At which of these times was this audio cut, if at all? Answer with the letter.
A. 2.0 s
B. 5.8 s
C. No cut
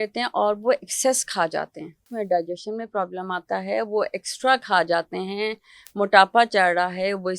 A